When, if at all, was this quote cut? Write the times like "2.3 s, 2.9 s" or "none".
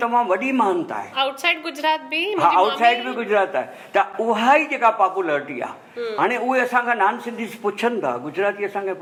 none